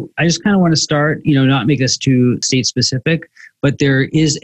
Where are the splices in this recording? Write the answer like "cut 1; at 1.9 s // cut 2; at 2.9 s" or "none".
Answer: cut 1; at 2.4 s